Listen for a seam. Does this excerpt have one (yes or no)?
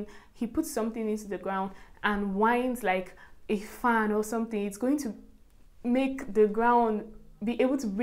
no